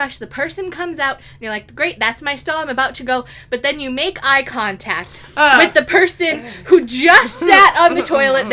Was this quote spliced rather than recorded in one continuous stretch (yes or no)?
no